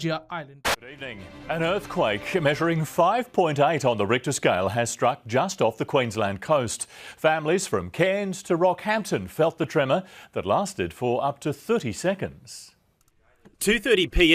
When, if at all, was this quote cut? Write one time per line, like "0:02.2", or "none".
none